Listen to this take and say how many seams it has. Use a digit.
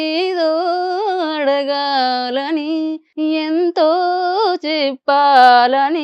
1